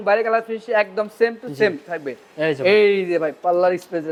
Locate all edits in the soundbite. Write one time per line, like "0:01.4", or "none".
none